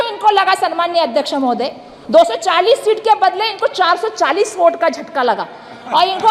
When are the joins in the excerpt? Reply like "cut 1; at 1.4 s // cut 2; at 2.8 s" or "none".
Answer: none